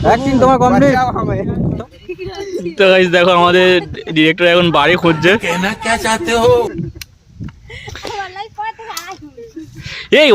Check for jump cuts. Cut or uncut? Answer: cut